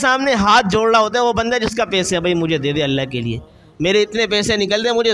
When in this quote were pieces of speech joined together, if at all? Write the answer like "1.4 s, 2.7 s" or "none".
none